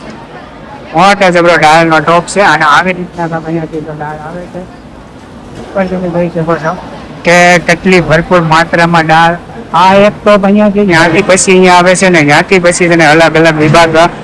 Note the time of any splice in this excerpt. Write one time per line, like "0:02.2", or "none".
none